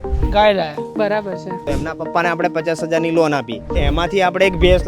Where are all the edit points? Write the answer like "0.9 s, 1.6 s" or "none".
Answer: 1.6 s, 3.8 s